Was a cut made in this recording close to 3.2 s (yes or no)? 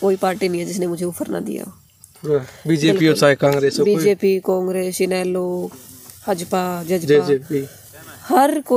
no